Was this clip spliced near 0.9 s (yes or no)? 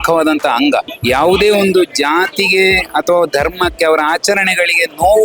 yes